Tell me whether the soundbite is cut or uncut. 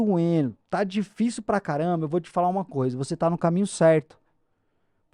uncut